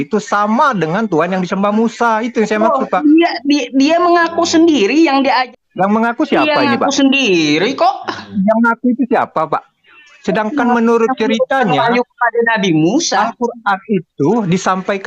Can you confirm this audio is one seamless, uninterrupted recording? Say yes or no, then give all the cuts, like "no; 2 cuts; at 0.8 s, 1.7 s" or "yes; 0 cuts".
no; 1 cut; at 5.5 s